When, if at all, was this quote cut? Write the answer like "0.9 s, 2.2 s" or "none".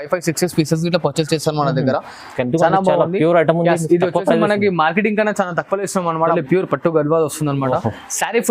6.4 s